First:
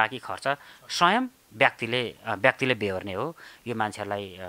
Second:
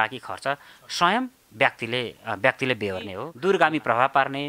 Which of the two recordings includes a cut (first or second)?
second